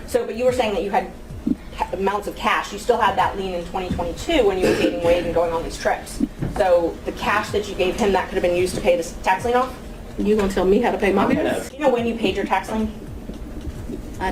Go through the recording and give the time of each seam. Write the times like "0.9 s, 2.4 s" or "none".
11.7 s